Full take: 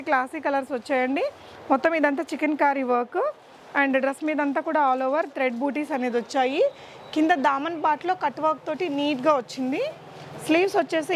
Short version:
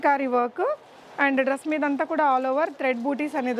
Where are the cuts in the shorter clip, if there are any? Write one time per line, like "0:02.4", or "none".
none